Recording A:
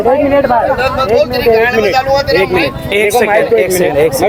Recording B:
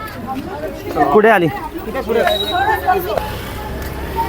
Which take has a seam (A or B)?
B